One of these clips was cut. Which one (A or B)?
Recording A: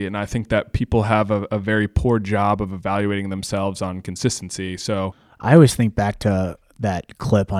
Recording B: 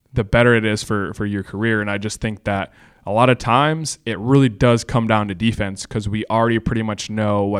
A